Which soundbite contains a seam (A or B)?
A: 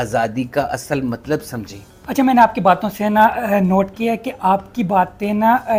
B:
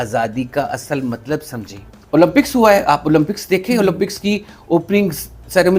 B